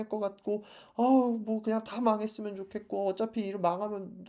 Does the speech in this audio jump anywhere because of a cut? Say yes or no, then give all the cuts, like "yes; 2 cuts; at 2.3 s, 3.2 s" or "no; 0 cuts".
no; 0 cuts